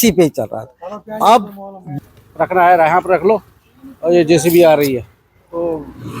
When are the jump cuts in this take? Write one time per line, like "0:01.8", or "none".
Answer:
0:01.9